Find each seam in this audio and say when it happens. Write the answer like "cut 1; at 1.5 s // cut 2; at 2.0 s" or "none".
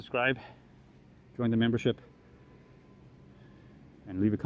none